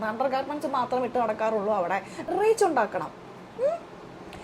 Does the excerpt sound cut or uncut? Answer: cut